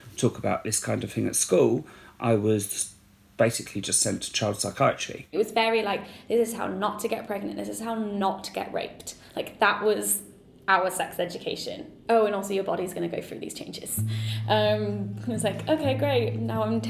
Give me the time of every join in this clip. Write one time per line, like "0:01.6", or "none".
0:05.3
0:08.2

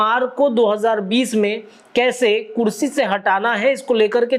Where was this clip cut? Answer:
none

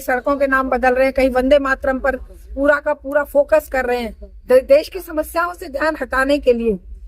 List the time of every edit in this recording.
none

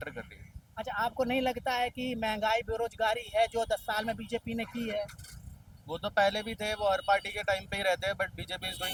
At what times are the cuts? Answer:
none

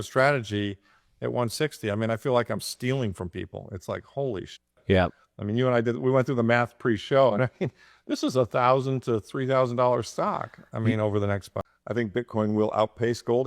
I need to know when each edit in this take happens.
0:11.6

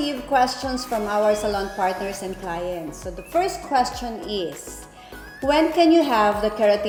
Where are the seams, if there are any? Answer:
none

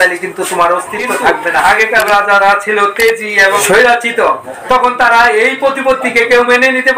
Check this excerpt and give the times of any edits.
0:01.6
0:03.6

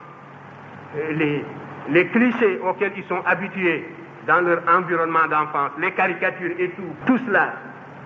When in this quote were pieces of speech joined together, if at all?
0:06.9

